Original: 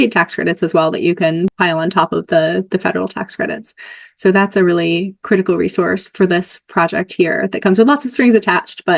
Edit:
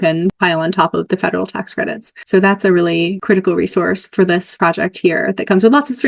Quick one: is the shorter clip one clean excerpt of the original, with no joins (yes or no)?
no